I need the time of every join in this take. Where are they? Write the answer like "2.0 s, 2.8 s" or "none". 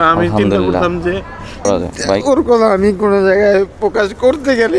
1.7 s